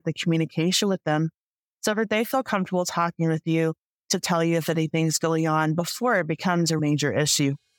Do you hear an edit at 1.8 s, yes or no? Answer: no